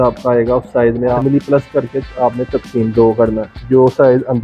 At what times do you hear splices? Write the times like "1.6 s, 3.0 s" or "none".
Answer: 1.2 s, 3.5 s